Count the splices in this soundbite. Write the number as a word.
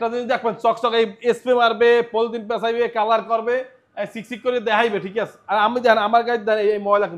zero